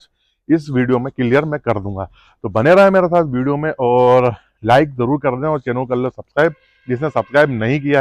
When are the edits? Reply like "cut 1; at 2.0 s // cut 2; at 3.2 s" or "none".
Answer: none